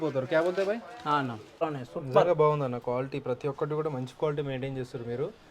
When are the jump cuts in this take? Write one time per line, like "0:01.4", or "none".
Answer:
0:01.6